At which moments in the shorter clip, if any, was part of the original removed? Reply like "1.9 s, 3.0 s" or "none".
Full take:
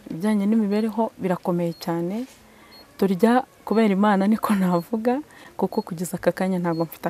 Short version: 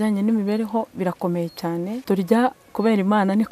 2.0 s